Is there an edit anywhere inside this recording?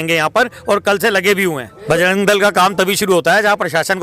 yes; 1 cut; at 1.7 s

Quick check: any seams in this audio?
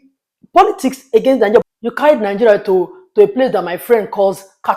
yes; 1 cut; at 1.6 s

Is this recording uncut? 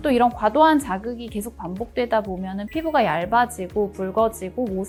yes; 0 cuts

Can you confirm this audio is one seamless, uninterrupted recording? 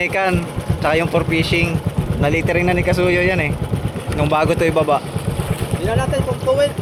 yes; 0 cuts

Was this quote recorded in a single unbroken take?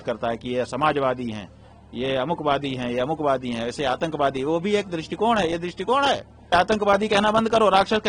no; 1 cut; at 6.5 s

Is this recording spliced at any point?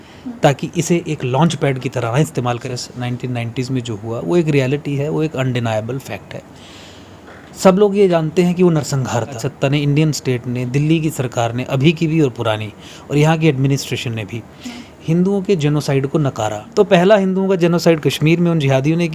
yes; 3 cuts; at 2.6 s, 9.5 s, 16.6 s

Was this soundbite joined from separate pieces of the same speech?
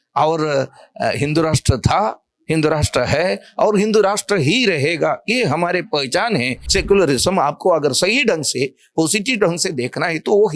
yes; 1 cut; at 6.6 s

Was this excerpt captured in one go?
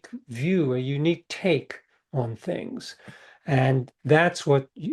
yes; 0 cuts

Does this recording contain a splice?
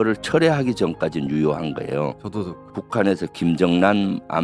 yes; 1 cut; at 2.7 s

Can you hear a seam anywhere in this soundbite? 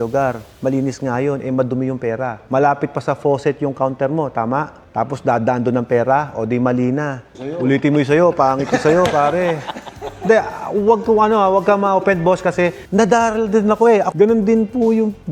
yes; 1 cut; at 14.1 s

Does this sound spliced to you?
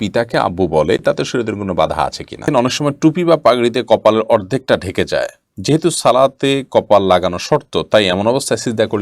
yes; 1 cut; at 2.5 s

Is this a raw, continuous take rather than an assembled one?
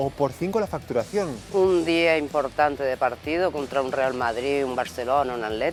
yes; 0 cuts

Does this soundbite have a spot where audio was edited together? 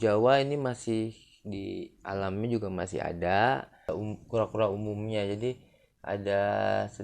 yes; 1 cut; at 3.9 s

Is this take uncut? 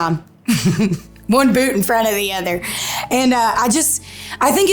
yes; 0 cuts

